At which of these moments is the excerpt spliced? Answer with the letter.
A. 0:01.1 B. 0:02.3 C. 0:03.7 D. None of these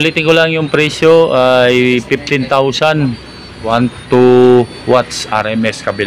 C